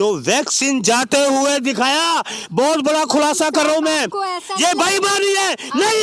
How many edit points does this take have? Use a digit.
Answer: 0